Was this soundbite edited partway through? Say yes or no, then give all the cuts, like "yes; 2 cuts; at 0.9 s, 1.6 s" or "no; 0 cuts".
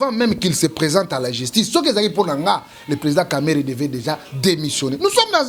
no; 0 cuts